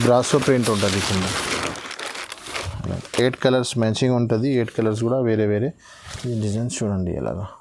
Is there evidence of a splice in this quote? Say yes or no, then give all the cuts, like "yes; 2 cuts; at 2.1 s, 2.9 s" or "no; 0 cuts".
no; 0 cuts